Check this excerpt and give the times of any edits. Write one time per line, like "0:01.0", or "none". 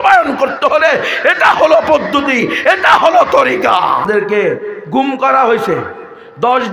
0:04.0